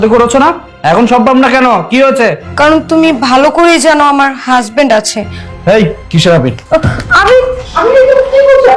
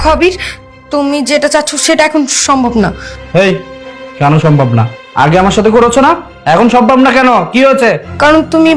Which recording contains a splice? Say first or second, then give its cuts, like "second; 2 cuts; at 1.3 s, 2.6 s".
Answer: first; 1 cut; at 5.5 s